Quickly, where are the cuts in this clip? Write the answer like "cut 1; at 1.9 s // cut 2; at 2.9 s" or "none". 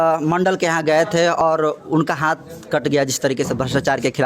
cut 1; at 1.4 s